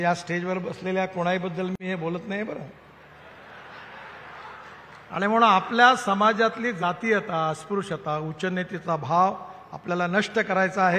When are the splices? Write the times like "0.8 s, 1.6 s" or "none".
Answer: none